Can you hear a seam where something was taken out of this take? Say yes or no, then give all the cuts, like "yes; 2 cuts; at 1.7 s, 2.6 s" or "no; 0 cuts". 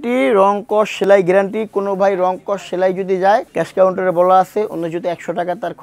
no; 0 cuts